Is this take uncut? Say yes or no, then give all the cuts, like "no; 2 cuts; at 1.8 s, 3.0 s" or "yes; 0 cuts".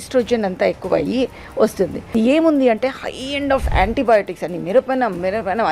no; 1 cut; at 2.1 s